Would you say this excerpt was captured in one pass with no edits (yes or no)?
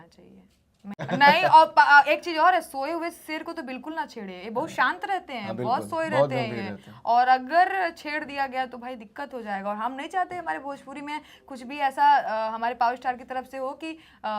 no